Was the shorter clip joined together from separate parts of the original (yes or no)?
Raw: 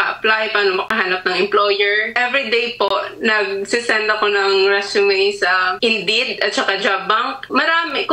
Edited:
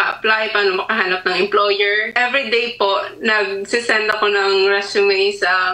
no